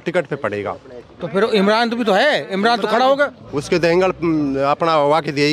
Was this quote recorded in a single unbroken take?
yes; 0 cuts

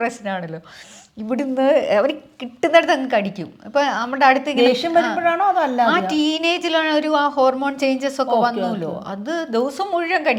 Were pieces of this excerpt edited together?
no; 0 cuts

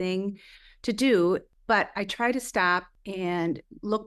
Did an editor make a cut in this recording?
yes; 2 cuts; at 1.5 s, 3.0 s

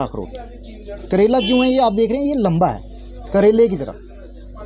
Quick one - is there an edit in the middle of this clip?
no; 0 cuts

